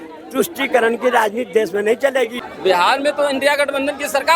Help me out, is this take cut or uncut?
cut